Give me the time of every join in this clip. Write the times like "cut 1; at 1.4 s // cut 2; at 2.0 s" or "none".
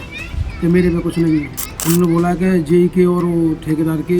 cut 1; at 1.7 s